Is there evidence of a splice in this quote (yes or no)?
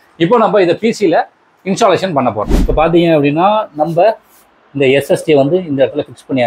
yes